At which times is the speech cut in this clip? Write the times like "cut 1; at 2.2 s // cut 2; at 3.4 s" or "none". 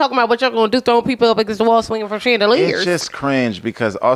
none